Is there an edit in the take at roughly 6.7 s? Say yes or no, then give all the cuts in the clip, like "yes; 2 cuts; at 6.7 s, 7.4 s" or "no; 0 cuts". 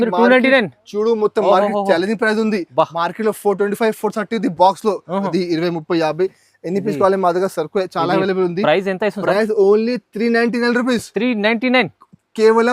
no; 1 cut; at 5.3 s